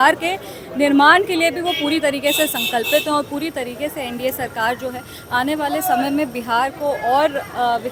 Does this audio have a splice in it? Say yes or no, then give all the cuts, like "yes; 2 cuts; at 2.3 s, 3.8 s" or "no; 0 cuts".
no; 0 cuts